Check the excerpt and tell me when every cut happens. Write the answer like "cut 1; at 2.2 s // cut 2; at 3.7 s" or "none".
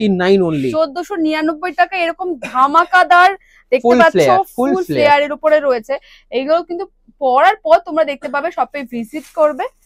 none